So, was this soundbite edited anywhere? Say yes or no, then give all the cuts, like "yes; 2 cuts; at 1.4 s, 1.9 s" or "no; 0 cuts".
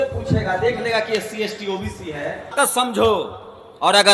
yes; 1 cut; at 2.5 s